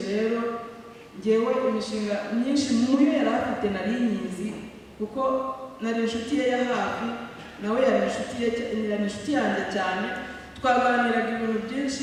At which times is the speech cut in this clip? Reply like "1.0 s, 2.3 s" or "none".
none